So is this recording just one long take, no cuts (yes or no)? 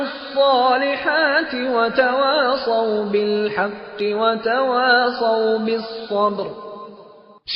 yes